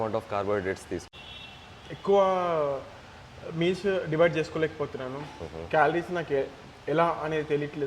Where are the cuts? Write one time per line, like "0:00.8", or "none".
0:01.1